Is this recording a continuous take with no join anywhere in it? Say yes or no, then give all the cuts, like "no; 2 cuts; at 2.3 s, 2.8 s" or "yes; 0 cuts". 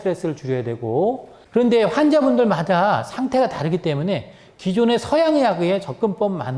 no; 1 cut; at 1.3 s